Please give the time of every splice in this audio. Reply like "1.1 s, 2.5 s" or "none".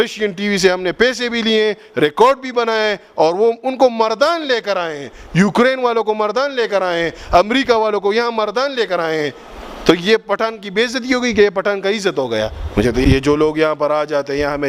13.0 s